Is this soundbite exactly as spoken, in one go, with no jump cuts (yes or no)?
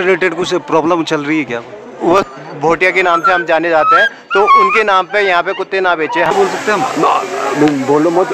no